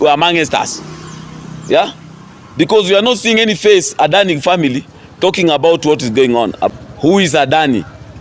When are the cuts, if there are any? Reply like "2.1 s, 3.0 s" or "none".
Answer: 6.7 s